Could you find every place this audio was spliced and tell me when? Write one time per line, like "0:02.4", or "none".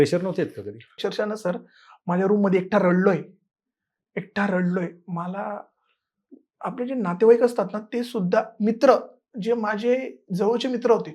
0:00.9